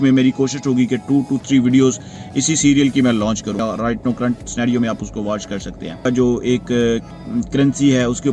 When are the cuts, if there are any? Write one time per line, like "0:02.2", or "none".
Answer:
0:03.6
0:06.0